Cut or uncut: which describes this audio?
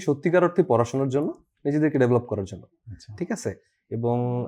uncut